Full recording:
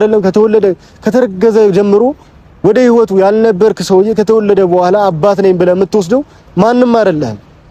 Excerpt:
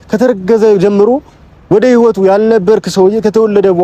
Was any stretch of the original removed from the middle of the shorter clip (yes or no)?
no